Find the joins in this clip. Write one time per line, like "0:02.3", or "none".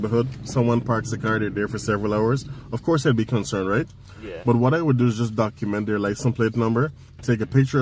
none